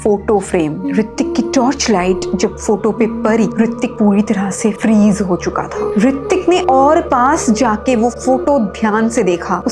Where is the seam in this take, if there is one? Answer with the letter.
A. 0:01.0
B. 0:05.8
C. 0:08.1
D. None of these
B